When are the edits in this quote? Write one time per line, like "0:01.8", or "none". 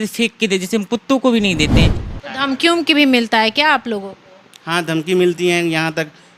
0:02.0